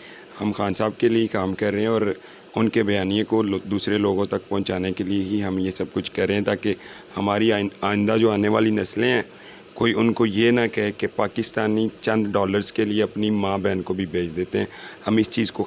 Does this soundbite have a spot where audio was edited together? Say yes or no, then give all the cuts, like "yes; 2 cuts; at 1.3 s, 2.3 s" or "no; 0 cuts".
no; 0 cuts